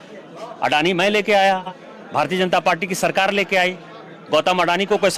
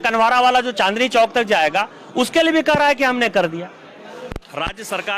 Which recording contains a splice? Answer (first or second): second